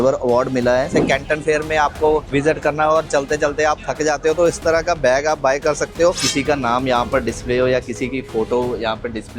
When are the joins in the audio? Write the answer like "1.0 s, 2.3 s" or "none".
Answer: 0.9 s, 2.3 s, 6.2 s